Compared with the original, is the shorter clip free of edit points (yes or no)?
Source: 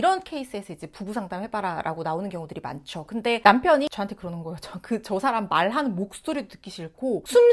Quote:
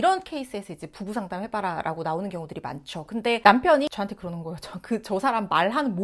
yes